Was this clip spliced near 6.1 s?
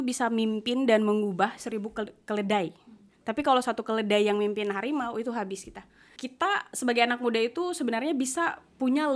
yes; 1 cut; at 6.1 s

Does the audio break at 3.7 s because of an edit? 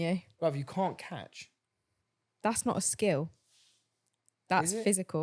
no; 0 cuts

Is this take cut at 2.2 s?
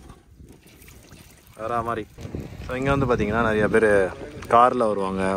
yes; 1 cut; at 2.2 s

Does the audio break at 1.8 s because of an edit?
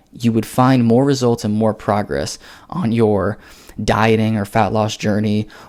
no; 0 cuts

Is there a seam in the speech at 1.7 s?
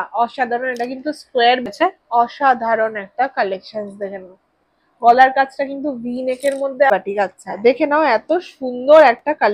yes; 2 cuts; at 1.7 s, 6.9 s

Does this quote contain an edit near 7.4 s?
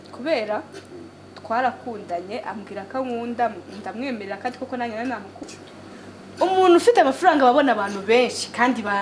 no; 1 cut; at 5.5 s

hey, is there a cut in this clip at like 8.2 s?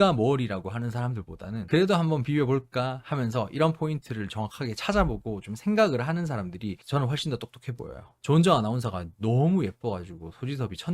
yes; 1 cut; at 8.2 s

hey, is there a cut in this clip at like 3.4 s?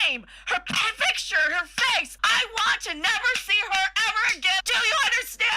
no; 2 cuts; at 2.1 s, 4.6 s

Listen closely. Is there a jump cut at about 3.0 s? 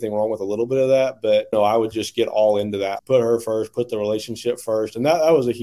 yes; 2 cuts; at 1.5 s, 3.0 s

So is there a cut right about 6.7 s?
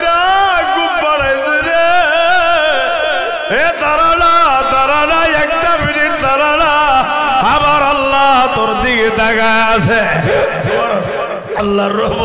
no; 0 cuts

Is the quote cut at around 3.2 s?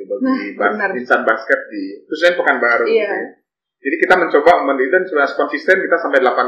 no; 0 cuts

